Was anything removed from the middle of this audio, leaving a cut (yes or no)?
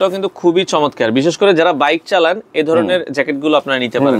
no